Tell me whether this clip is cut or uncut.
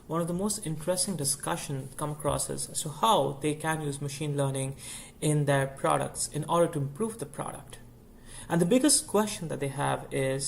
cut